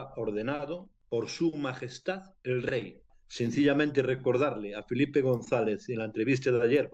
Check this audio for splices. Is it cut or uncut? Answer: cut